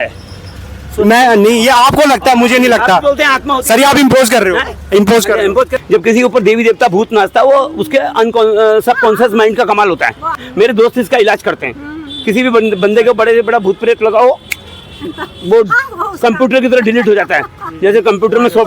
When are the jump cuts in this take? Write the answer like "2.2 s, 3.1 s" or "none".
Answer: 5.8 s, 10.4 s